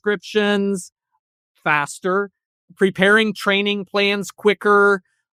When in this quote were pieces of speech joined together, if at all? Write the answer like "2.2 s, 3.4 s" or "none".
none